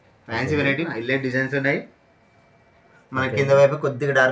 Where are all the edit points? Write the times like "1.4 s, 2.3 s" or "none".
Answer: 0.9 s, 2.9 s